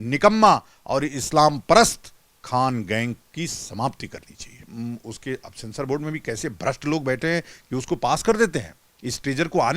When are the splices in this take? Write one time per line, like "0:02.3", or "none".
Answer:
0:04.7